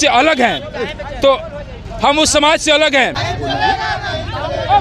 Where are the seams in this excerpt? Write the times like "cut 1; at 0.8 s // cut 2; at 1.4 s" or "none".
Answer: cut 1; at 3.3 s